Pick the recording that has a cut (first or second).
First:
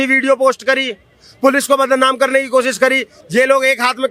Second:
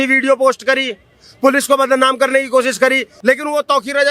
second